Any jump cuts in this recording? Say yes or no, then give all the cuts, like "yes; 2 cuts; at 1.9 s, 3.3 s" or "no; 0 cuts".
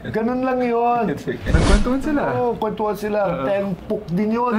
yes; 1 cut; at 1.5 s